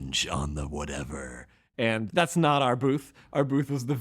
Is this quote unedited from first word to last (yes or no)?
no